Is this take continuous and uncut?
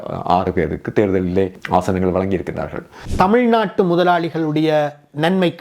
no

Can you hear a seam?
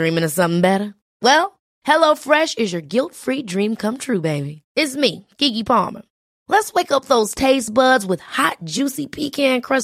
no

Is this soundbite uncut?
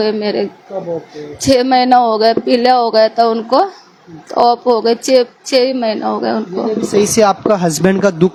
yes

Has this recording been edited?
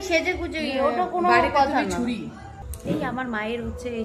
no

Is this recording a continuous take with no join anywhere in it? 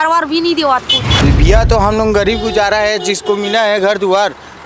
no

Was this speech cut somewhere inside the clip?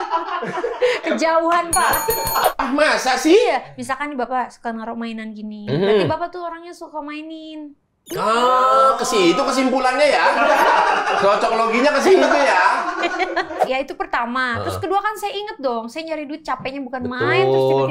yes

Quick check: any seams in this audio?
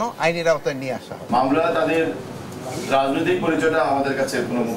yes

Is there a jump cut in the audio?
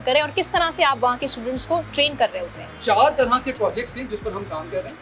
no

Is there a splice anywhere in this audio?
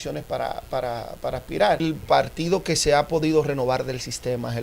yes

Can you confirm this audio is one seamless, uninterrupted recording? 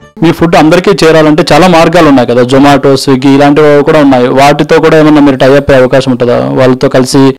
yes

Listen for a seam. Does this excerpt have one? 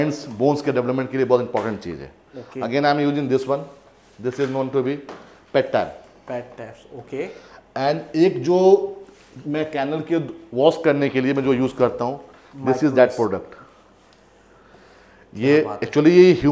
no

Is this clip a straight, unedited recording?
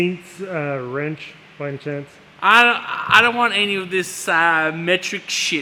yes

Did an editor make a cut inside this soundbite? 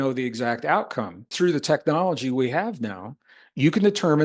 yes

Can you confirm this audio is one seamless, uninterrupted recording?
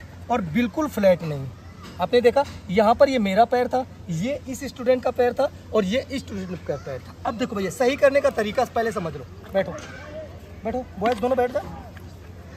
yes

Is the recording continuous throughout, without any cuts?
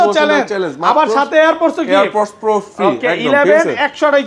yes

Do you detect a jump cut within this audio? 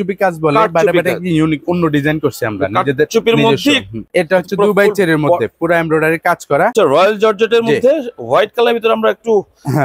yes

